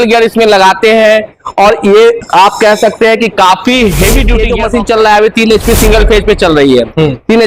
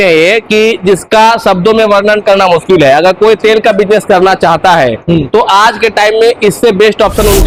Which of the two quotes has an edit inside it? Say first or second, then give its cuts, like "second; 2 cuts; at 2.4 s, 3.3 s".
first; 1 cut; at 4.4 s